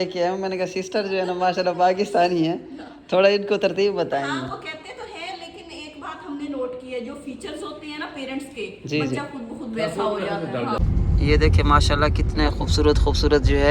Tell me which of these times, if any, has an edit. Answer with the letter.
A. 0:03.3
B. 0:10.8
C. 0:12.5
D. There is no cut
B